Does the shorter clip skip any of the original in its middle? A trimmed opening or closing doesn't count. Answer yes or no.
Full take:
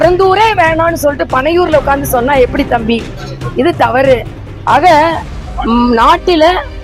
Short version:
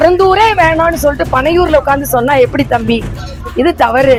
no